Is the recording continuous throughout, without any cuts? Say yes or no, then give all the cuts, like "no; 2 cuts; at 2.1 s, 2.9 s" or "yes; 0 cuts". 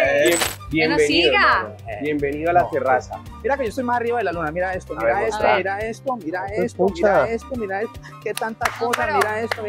no; 1 cut; at 3.2 s